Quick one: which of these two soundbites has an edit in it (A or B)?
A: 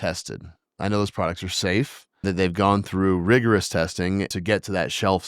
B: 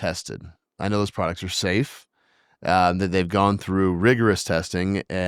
A